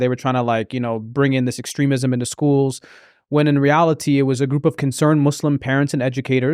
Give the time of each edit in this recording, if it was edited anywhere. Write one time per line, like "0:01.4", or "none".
none